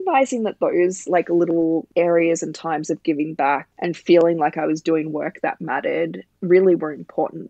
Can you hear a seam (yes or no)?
yes